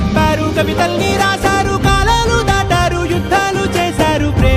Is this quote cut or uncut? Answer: uncut